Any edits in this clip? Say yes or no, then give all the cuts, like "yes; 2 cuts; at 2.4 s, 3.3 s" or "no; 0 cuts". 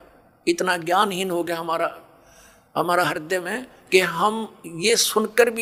no; 0 cuts